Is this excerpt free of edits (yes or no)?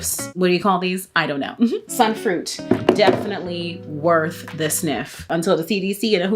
no